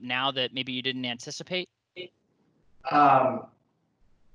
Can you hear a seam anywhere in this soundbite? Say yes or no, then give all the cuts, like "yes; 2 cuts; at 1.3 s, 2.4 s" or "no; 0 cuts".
no; 0 cuts